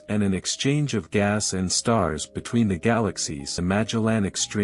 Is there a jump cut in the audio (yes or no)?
yes